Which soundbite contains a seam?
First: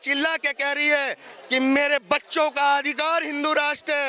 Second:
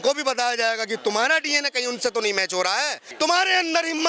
second; 1 cut; at 3.0 s

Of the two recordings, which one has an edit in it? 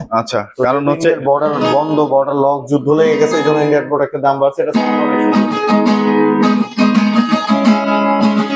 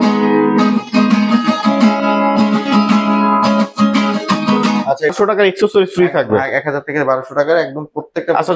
second; 1 cut; at 5.1 s

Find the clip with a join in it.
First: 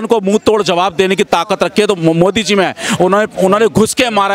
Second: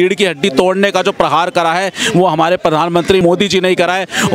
second; 1 cut; at 3.2 s

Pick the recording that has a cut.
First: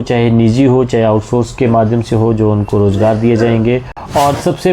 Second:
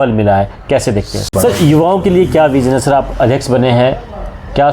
second; 1 cut; at 1.2 s

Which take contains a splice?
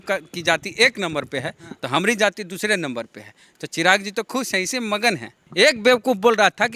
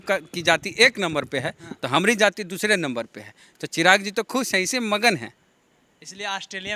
first; 1 cut; at 5.4 s

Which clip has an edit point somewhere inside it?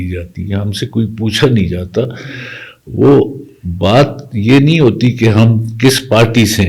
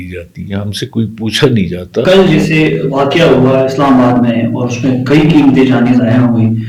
second; 1 cut; at 2.0 s

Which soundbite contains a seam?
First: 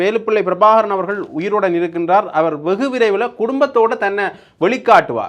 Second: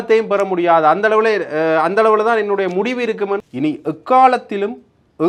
second; 1 cut; at 3.4 s

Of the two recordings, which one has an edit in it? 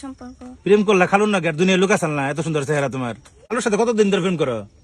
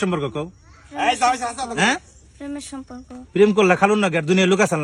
first; 1 cut; at 3.5 s

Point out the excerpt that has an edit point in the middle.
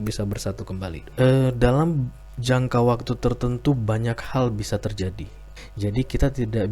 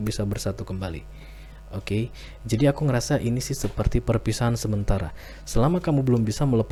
first; 2 cuts; at 1.0 s, 5.5 s

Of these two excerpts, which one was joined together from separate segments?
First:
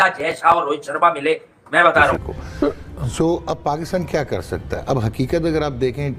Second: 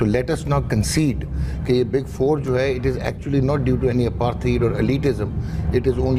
first; 1 cut; at 2.3 s

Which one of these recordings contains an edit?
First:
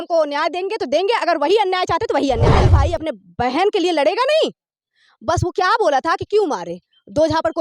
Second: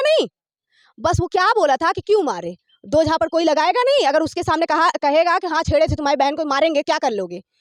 first; 1 cut; at 2.8 s

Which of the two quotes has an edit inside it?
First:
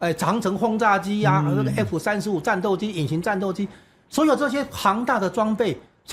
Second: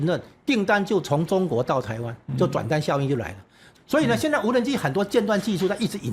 second; 1 cut; at 3.7 s

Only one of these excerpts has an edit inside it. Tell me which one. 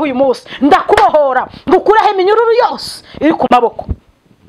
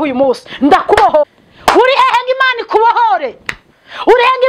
second; 1 cut; at 1.3 s

